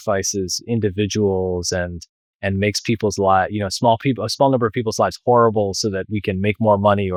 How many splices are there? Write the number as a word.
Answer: zero